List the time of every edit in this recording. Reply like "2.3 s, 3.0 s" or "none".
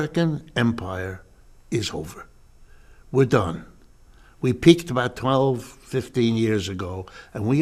none